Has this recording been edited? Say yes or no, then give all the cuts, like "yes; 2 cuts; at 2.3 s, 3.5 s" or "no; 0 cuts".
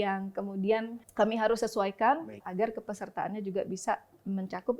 yes; 2 cuts; at 1.0 s, 2.4 s